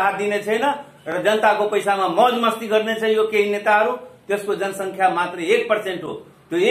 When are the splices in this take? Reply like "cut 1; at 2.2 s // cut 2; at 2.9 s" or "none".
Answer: none